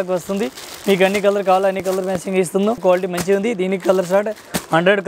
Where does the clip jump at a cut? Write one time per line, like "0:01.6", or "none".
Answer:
0:02.8